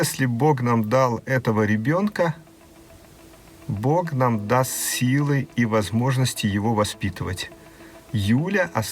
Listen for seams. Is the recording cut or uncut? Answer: uncut